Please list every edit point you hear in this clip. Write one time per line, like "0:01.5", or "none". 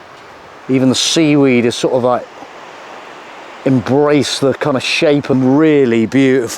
0:05.3